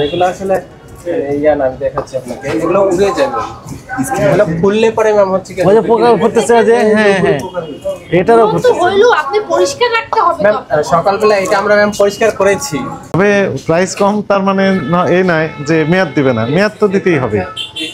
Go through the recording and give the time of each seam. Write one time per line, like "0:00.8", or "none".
0:13.1